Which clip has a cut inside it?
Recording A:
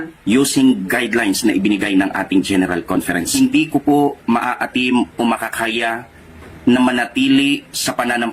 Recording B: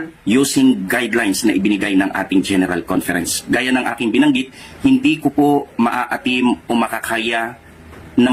A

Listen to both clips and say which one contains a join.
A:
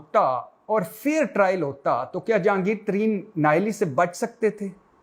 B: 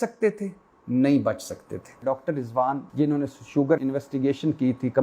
B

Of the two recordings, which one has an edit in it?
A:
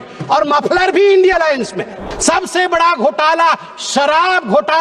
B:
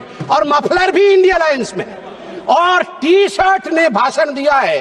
A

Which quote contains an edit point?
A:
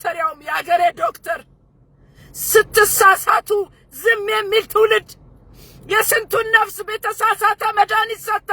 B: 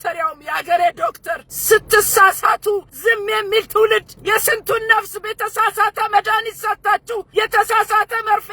B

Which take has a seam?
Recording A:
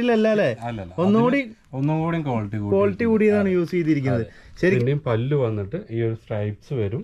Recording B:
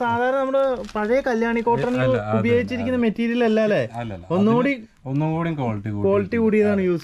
A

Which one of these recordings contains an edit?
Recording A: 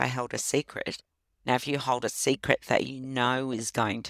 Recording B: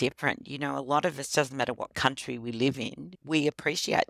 B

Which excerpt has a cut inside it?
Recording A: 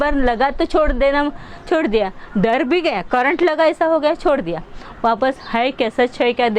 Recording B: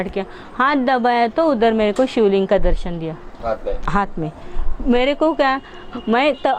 B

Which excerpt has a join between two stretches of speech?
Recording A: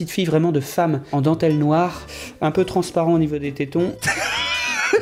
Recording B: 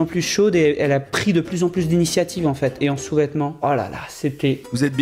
B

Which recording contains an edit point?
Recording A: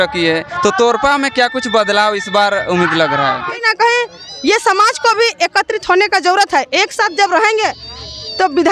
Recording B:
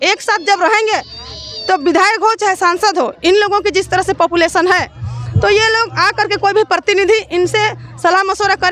A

